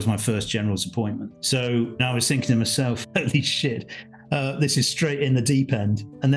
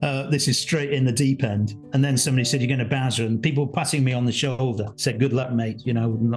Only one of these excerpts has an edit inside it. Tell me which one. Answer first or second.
first